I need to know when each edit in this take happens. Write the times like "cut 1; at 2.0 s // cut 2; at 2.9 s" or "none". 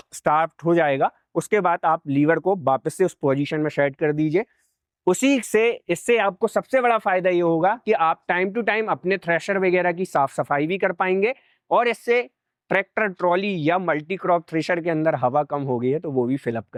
none

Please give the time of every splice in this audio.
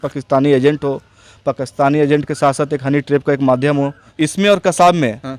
cut 1; at 4.1 s

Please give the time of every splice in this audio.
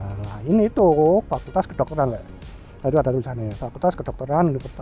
none

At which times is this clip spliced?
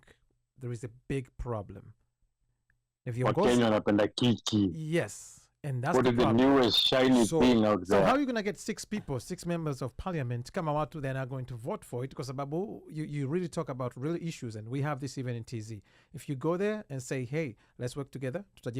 none

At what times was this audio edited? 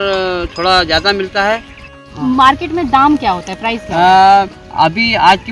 cut 1; at 1.9 s // cut 2; at 4.5 s

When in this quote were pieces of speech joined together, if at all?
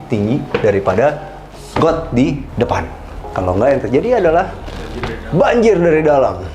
cut 1; at 2.5 s

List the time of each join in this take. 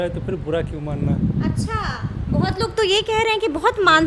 none

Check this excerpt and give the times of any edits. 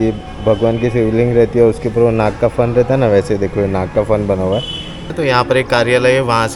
cut 1; at 5.1 s

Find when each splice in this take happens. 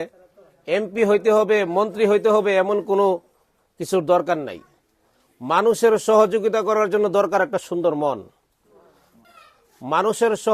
cut 1; at 9.2 s

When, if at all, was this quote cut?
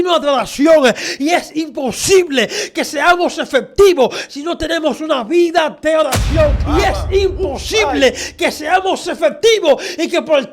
cut 1; at 6.6 s

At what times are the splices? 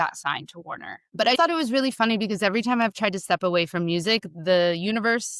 cut 1; at 1.2 s

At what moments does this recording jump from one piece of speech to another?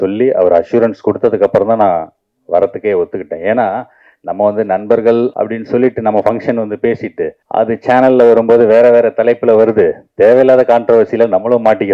cut 1; at 5.3 s // cut 2; at 7.4 s

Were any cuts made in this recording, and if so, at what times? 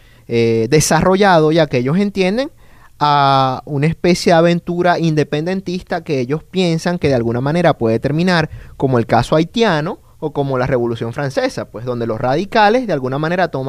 cut 1; at 5.6 s

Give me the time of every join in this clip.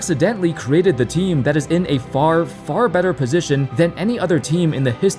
none

